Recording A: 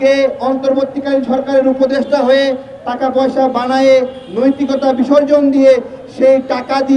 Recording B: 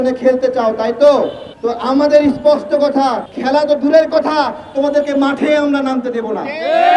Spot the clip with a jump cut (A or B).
B